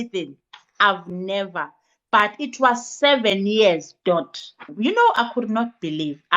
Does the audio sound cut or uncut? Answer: cut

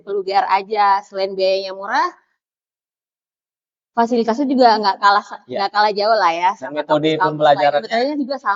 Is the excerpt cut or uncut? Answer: uncut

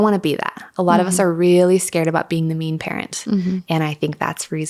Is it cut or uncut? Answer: uncut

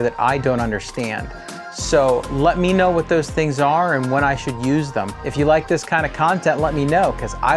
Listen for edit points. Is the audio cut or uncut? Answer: cut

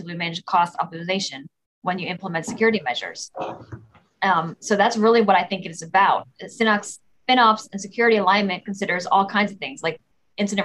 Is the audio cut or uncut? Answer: uncut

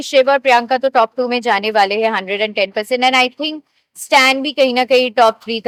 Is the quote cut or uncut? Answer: uncut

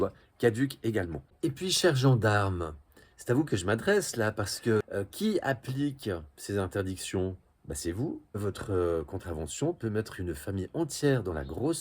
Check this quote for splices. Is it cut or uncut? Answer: cut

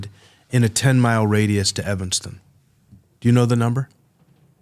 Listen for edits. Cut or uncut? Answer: uncut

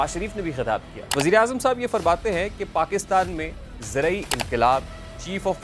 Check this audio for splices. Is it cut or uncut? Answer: cut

